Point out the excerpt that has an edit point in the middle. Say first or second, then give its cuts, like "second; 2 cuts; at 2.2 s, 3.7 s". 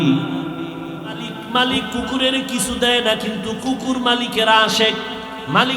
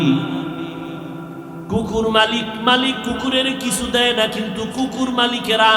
first; 1 cut; at 1.3 s